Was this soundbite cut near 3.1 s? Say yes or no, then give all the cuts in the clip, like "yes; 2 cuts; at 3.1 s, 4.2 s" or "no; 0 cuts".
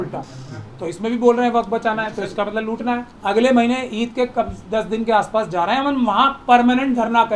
yes; 1 cut; at 3.1 s